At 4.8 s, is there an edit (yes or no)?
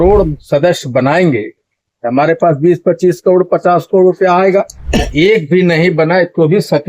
yes